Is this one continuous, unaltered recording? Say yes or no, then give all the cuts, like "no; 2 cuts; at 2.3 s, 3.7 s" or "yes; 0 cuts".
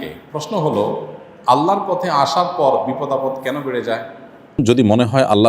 no; 1 cut; at 4.6 s